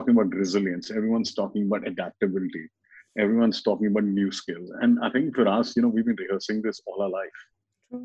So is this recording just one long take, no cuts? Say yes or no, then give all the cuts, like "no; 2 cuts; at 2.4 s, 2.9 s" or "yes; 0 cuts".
yes; 0 cuts